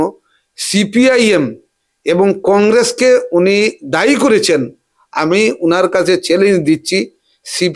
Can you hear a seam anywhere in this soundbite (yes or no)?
no